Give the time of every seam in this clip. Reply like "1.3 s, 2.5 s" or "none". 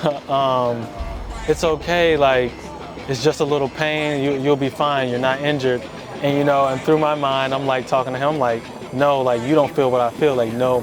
none